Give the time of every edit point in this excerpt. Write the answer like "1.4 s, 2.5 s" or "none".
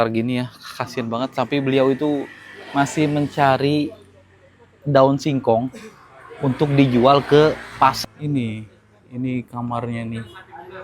8.0 s